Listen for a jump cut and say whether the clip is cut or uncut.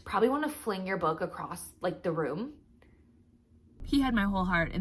cut